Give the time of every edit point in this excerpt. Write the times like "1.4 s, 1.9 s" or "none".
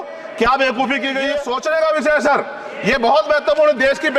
1.4 s

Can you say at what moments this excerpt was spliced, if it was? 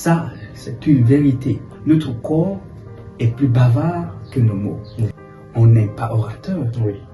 5.3 s

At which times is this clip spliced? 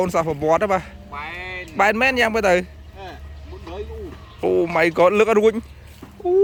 none

